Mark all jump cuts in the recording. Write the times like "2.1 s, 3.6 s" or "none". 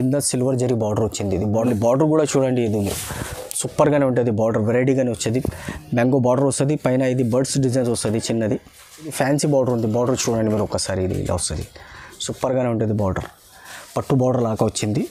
1.5 s, 9.1 s